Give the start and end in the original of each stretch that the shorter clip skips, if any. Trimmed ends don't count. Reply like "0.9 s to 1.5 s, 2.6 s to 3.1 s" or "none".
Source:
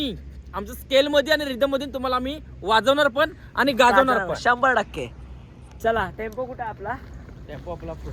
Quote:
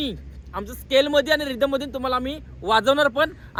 none